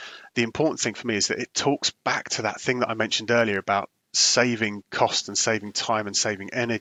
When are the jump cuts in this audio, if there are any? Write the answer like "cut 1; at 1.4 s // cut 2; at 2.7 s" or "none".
none